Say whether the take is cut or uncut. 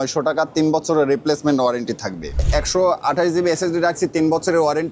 cut